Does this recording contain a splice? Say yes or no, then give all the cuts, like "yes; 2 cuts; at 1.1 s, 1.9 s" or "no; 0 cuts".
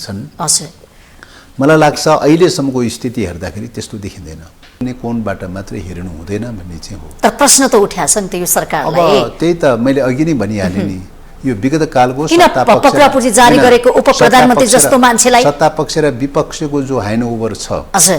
yes; 1 cut; at 4.8 s